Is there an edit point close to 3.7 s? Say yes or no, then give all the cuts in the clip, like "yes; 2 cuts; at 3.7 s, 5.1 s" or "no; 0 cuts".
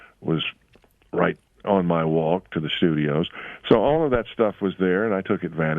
no; 1 cut; at 1.6 s